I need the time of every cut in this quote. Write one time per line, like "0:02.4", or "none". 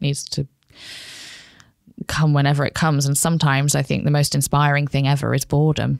none